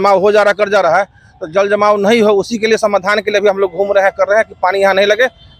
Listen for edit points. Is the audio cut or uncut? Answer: uncut